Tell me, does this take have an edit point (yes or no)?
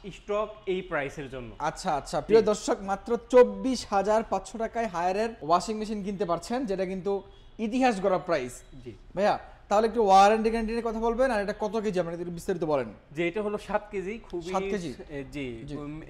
no